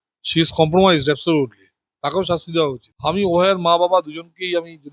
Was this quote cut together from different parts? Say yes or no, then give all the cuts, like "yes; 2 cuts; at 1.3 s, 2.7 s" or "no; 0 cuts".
yes; 1 cut; at 2.9 s